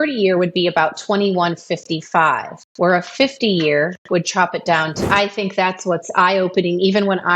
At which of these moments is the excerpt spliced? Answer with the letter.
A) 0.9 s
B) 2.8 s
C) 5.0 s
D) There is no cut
C